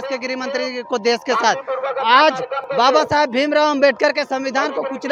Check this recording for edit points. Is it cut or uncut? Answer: uncut